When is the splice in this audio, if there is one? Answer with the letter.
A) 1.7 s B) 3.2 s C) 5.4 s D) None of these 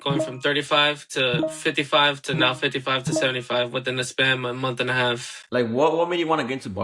C